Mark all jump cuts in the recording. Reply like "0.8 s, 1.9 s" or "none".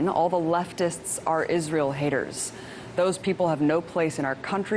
none